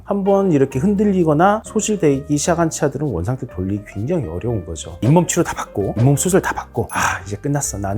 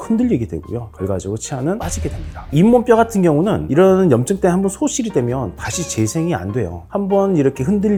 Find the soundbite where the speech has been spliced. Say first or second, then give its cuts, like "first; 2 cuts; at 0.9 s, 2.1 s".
first; 1 cut; at 5.0 s